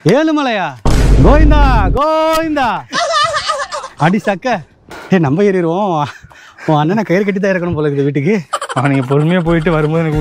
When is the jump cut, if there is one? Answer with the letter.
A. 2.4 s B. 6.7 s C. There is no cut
C